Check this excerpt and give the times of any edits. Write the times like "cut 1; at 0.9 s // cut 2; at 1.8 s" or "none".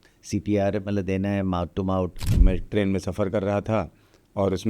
cut 1; at 2.4 s